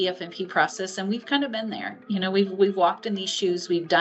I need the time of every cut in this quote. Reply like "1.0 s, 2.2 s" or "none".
none

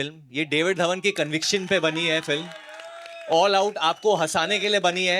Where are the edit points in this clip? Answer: none

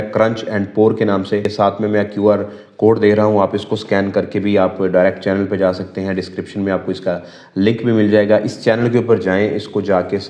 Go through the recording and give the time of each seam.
none

